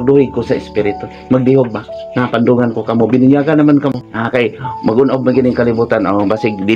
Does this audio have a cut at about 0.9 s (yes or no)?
no